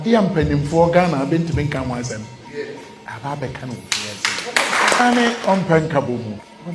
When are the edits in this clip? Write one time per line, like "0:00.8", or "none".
0:05.0